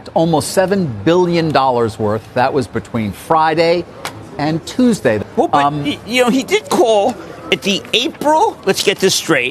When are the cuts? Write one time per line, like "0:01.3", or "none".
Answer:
0:05.2